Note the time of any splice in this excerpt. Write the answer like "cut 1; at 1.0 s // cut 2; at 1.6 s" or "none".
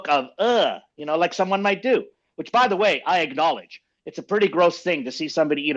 none